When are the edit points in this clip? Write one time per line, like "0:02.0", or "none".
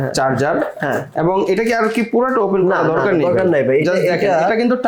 none